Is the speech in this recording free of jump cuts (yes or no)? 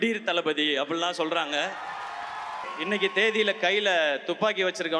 no